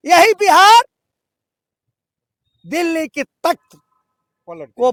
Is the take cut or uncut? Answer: uncut